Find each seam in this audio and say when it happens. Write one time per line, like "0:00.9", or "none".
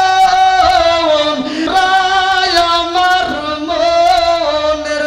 0:01.6